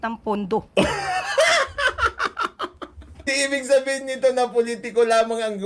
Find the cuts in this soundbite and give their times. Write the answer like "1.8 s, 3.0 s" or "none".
3.3 s